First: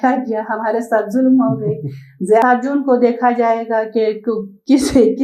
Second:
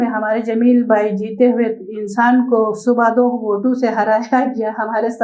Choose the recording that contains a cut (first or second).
first